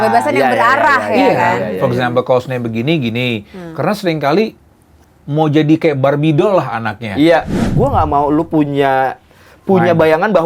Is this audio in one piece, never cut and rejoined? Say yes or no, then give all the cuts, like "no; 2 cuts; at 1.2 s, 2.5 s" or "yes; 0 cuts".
no; 1 cut; at 7.6 s